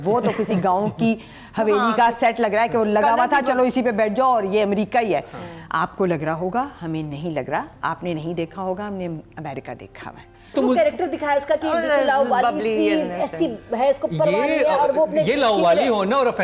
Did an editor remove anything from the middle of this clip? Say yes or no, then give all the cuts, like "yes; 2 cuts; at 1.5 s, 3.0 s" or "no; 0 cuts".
yes; 1 cut; at 10.5 s